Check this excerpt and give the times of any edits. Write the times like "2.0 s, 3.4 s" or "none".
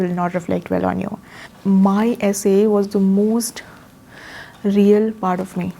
1.5 s